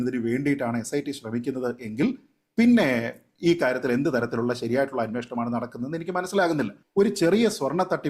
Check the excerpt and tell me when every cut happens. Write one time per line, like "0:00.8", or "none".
0:06.8